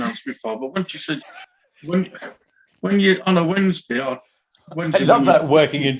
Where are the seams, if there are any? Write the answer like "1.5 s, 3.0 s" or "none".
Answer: none

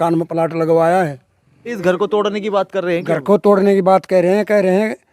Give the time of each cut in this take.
1.8 s

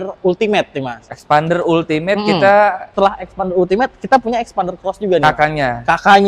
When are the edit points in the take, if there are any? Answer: 2.8 s

